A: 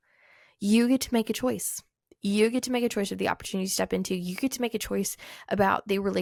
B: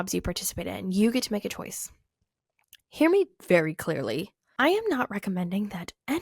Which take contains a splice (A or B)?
B